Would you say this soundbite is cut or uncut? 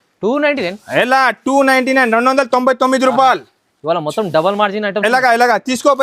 uncut